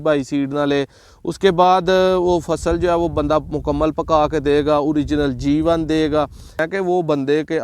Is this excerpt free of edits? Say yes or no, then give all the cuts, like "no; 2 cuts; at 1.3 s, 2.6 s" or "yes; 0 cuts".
no; 1 cut; at 6.5 s